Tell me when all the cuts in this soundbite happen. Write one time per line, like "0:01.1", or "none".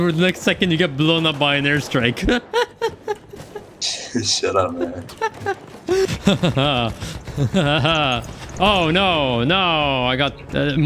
0:06.1